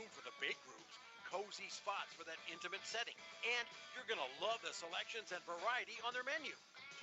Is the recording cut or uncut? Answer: cut